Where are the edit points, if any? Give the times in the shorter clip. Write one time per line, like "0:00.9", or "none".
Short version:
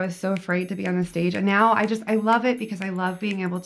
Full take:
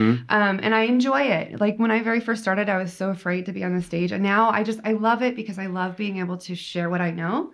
none